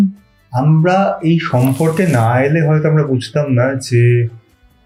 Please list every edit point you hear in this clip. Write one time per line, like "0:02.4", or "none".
none